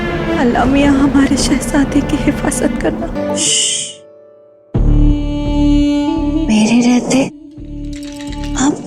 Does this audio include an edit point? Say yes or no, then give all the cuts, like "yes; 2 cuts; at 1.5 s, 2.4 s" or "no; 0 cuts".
yes; 1 cut; at 3.2 s